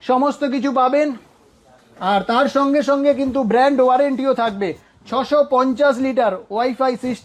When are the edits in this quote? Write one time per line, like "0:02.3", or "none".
none